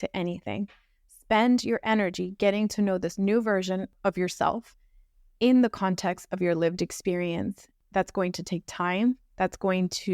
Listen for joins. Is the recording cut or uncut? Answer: cut